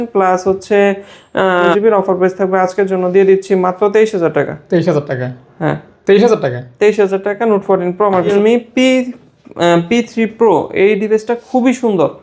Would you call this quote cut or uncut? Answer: cut